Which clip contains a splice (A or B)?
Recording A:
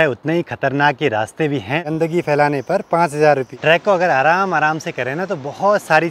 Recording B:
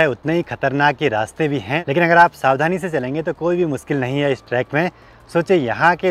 A